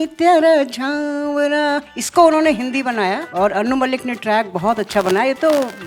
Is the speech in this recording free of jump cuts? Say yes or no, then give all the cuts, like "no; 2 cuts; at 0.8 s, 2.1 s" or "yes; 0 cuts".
no; 2 cuts; at 2.0 s, 3.3 s